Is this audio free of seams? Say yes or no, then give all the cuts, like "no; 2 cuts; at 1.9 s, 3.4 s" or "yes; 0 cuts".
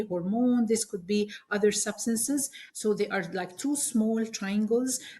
no; 1 cut; at 2.6 s